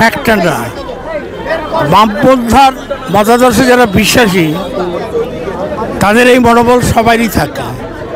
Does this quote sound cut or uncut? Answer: uncut